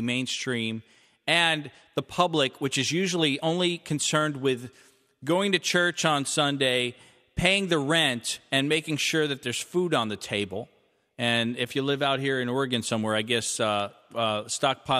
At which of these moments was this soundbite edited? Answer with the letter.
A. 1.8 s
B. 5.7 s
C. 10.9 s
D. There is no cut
D